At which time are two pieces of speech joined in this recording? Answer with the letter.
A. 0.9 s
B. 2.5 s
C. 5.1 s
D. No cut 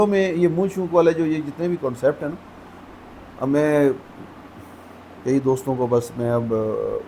D